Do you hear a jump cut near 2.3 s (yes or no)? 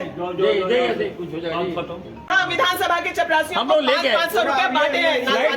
yes